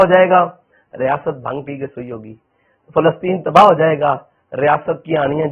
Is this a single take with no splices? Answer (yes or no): yes